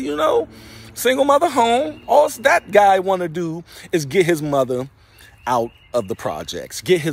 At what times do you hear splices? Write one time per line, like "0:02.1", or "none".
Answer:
none